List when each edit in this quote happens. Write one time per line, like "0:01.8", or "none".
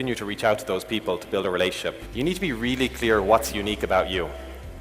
0:02.0